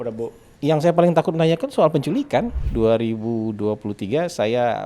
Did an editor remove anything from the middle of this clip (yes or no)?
yes